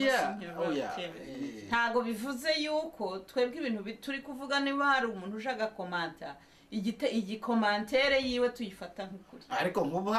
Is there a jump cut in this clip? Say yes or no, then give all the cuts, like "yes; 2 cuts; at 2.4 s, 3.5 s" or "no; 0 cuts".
yes; 1 cut; at 1.5 s